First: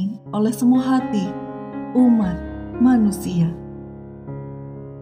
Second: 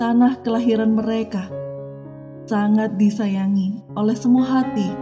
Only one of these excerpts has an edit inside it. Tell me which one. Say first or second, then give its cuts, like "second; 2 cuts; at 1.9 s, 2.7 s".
first; 1 cut; at 3.6 s